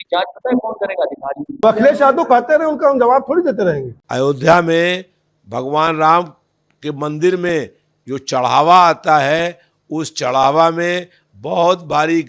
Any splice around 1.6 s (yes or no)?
yes